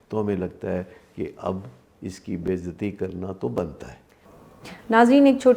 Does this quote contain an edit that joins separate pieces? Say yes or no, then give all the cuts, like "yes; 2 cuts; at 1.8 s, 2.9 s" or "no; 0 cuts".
no; 0 cuts